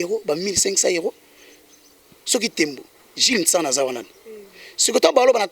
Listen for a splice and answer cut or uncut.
uncut